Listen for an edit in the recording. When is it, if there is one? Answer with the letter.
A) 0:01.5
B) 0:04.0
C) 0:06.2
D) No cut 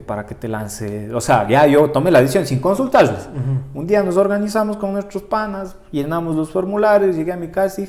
D